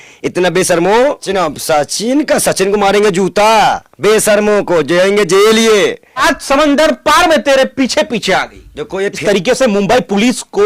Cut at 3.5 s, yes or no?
no